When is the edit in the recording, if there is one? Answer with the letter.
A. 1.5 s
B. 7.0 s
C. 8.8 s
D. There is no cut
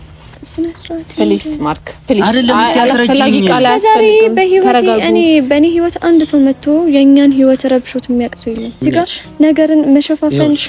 C